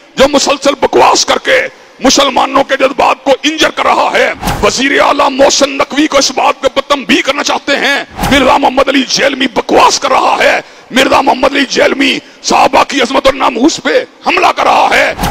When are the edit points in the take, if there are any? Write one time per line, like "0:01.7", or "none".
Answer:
0:04.4
0:08.1